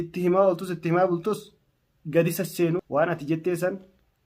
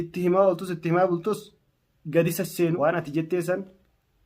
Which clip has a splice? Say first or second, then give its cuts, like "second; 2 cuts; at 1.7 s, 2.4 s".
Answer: second; 1 cut; at 2.8 s